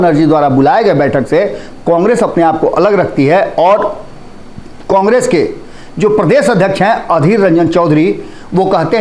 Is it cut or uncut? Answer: uncut